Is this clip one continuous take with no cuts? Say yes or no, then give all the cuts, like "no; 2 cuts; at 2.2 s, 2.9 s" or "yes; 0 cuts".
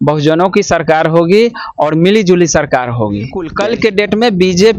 no; 1 cut; at 3.5 s